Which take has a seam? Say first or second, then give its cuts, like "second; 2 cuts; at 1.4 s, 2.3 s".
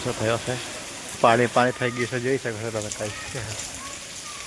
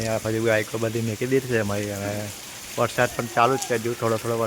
first; 1 cut; at 1.1 s